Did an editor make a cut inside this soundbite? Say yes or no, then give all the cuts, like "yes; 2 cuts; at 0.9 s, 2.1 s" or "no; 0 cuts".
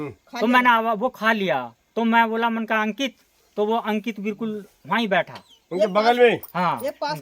no; 0 cuts